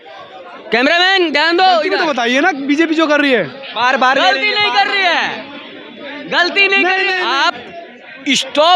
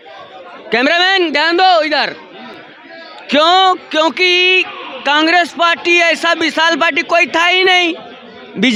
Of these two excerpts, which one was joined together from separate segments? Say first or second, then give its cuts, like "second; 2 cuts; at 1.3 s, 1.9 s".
first; 2 cuts; at 2.0 s, 7.2 s